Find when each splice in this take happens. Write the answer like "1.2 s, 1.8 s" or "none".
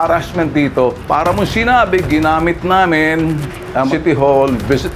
1.0 s

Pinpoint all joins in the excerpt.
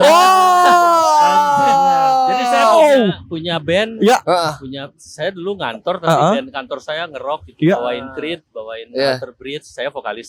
none

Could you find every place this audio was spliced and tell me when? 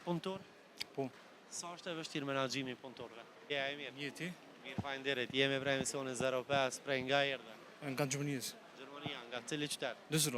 3.3 s

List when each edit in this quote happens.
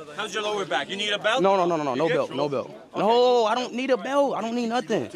none

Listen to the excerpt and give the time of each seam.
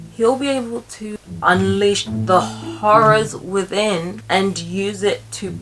1.3 s, 4.2 s

